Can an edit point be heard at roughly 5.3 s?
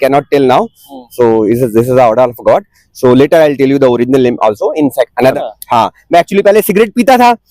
yes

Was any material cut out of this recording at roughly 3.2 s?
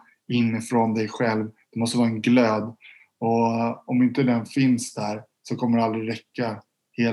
no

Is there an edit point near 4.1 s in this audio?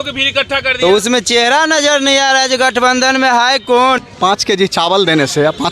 yes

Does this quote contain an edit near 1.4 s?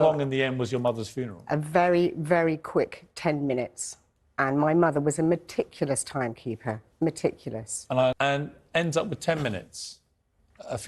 no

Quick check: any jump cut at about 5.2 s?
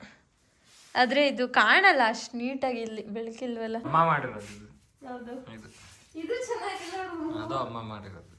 no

